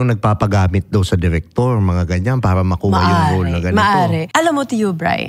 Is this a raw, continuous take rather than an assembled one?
no; 1 cut; at 4.2 s

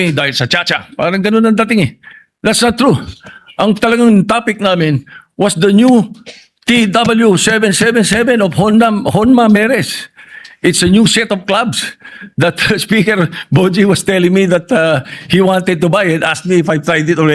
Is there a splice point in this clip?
no; 0 cuts

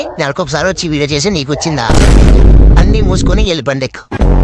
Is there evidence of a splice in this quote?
no; 0 cuts

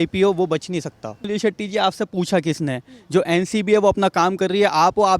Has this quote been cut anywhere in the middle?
yes; 1 cut; at 1.2 s

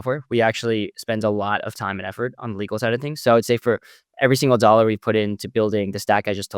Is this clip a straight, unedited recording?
yes; 0 cuts

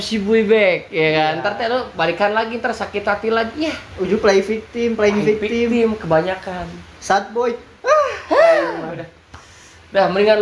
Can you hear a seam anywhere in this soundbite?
no; 0 cuts

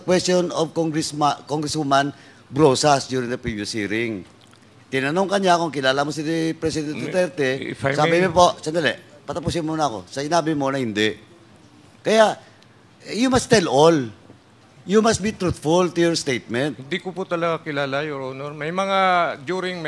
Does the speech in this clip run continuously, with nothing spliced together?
yes; 0 cuts

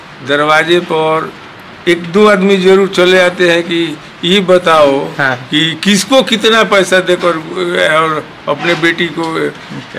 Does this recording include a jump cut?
no; 0 cuts

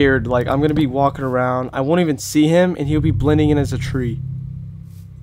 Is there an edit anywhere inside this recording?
no; 0 cuts

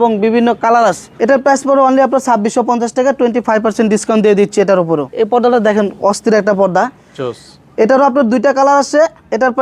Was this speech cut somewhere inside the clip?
yes; 2 cuts; at 1.1 s, 5.1 s

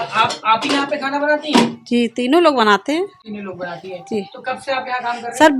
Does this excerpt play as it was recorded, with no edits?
yes; 0 cuts

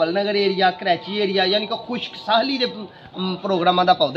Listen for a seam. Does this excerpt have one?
no; 0 cuts

